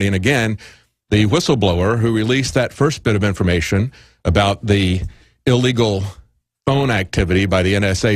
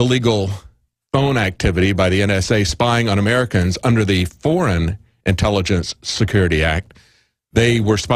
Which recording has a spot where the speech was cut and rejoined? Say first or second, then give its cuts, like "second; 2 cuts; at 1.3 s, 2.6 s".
first; 1 cut; at 4.5 s